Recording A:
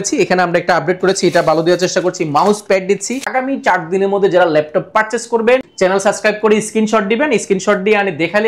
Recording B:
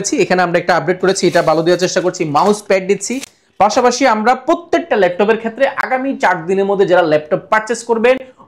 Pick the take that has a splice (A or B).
A